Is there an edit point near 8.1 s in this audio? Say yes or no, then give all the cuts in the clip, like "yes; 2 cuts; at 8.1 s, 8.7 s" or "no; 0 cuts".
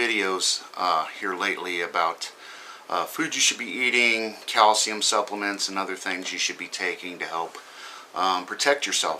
no; 1 cut; at 6.7 s